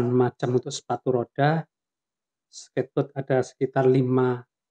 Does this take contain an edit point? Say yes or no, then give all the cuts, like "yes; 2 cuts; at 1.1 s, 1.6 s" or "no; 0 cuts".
no; 0 cuts